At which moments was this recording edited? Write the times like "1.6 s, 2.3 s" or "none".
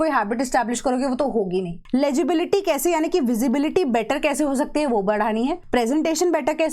1.8 s, 5.6 s